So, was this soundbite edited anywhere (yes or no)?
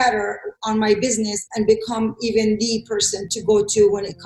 yes